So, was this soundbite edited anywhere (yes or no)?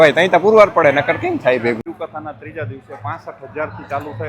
yes